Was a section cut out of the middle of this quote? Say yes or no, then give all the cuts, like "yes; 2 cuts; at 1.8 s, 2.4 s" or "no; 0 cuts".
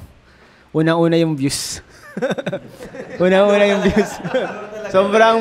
no; 0 cuts